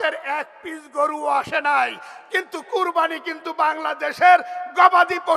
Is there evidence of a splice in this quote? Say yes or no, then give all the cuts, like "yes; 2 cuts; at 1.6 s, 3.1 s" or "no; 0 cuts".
no; 0 cuts